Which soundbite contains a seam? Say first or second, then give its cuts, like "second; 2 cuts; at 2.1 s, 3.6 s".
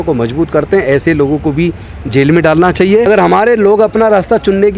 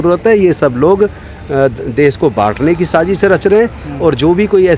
first; 1 cut; at 3.1 s